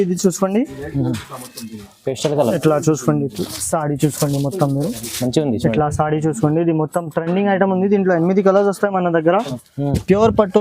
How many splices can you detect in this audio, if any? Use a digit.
1